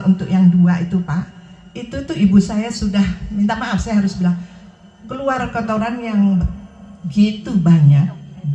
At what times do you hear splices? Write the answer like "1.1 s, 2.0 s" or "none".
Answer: none